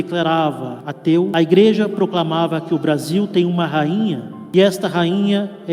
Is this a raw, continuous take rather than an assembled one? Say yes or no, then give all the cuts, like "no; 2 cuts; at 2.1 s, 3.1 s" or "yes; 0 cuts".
no; 2 cuts; at 1.1 s, 4.3 s